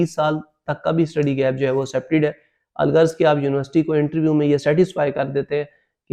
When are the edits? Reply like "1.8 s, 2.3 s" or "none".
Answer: none